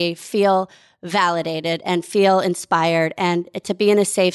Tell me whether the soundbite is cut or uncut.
uncut